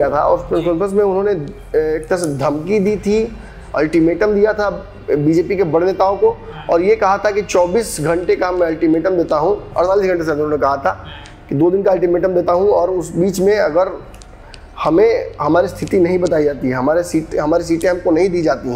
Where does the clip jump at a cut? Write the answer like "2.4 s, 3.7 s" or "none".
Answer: none